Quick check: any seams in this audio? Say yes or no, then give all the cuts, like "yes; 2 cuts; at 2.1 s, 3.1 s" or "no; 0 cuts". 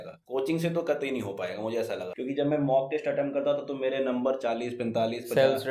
no; 0 cuts